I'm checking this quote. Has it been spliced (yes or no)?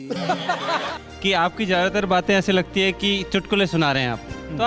yes